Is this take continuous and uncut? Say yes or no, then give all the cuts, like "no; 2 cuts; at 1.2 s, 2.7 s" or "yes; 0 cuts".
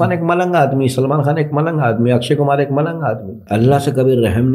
no; 1 cut; at 3.3 s